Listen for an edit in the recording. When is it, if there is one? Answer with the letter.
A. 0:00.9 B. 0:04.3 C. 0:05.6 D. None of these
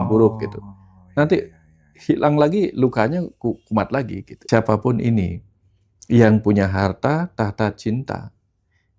B